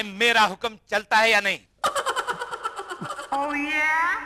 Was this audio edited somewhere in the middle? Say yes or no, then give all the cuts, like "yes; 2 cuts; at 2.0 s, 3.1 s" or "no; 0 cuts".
yes; 1 cut; at 3.2 s